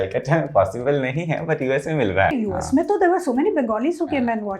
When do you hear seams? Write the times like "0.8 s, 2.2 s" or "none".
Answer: 2.3 s